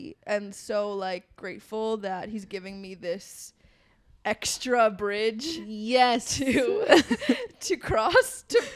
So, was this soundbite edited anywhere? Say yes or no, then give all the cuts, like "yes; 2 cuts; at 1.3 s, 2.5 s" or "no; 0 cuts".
no; 0 cuts